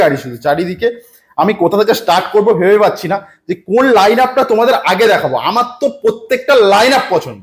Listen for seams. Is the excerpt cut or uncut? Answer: uncut